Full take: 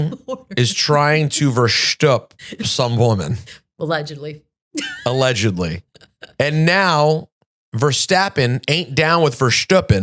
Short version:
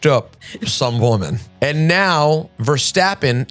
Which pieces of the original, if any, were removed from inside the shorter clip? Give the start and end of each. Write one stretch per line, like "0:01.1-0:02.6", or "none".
0:03.4-0:06.2
0:07.3-0:07.7